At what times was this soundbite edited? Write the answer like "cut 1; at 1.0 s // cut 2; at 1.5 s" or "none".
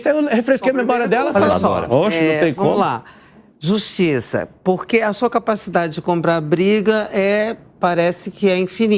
cut 1; at 1.3 s